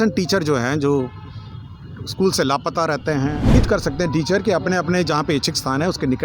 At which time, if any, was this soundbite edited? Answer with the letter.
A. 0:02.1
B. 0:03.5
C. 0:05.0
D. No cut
B